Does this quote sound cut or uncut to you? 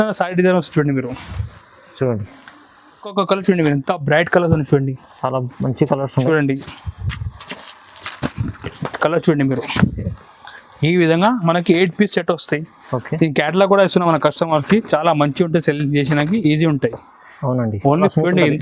cut